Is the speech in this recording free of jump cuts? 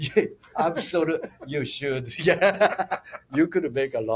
yes; 0 cuts

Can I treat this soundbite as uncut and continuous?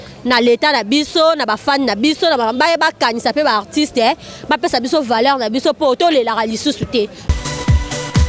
no; 1 cut; at 7.2 s

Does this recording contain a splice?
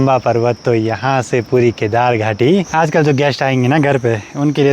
yes; 1 cut; at 2.7 s

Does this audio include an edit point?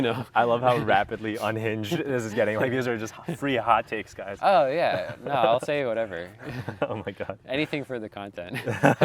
no; 0 cuts

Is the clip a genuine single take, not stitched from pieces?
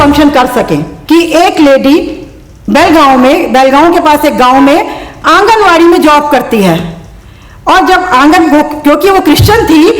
no; 1 cut; at 0.9 s

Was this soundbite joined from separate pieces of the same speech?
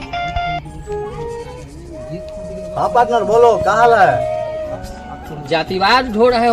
yes; 1 cut; at 4.7 s

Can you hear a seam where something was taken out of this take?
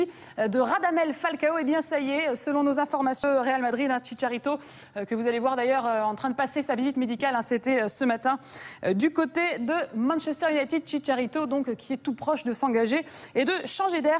yes; 1 cut; at 3.9 s

